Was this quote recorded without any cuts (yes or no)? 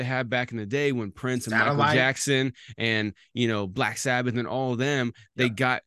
yes